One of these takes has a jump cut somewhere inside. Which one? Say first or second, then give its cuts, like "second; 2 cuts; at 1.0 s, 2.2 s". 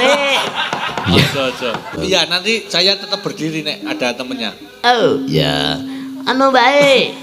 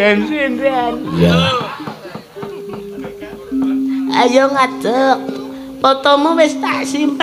first; 1 cut; at 2.0 s